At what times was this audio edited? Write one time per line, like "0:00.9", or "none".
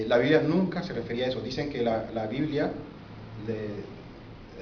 none